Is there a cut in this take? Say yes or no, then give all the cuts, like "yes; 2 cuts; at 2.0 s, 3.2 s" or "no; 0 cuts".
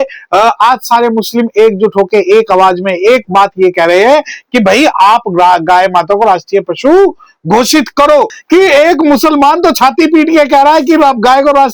yes; 1 cut; at 8.4 s